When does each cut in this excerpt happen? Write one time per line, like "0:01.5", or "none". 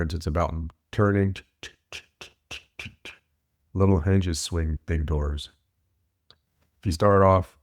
0:04.8